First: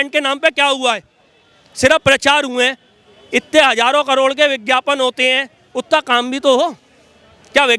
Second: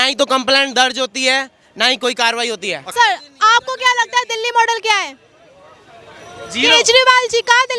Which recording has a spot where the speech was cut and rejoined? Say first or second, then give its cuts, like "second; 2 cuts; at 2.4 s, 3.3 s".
second; 1 cut; at 2.9 s